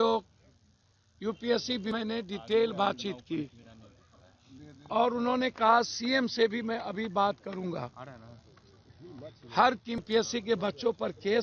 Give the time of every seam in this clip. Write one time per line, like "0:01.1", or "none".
0:02.0
0:10.0